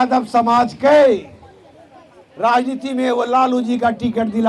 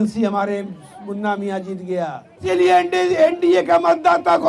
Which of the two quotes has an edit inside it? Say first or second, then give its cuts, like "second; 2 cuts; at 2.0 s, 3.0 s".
second; 1 cut; at 2.5 s